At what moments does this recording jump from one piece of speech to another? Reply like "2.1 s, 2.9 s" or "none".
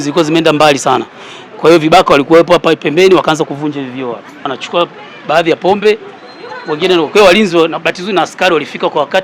4.5 s